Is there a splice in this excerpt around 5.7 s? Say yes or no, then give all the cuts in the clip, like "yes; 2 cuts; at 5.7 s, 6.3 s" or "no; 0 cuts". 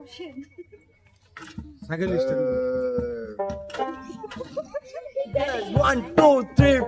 yes; 1 cut; at 5.7 s